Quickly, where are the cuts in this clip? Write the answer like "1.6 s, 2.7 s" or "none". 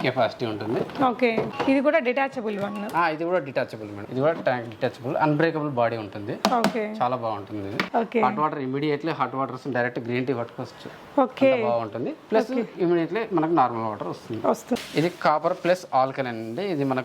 4.0 s, 7.8 s, 14.8 s